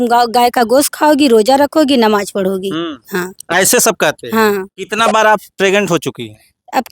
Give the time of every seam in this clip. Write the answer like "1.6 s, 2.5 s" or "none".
4.8 s